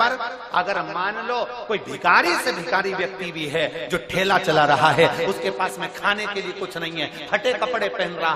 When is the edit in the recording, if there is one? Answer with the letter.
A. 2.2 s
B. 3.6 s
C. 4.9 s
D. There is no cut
D